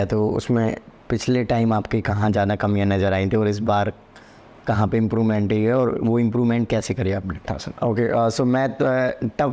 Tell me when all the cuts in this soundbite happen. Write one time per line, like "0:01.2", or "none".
0:07.4